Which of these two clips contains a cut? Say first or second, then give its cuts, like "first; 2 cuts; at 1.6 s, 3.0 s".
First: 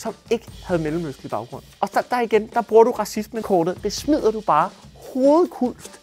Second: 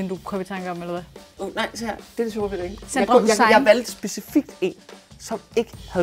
second; 1 cut; at 1.3 s